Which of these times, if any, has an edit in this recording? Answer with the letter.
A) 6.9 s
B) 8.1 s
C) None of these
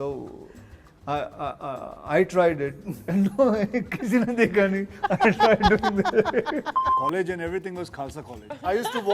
A